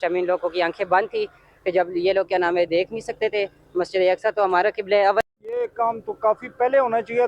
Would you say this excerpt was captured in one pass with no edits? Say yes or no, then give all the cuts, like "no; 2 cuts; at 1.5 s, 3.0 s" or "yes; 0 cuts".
no; 1 cut; at 5.2 s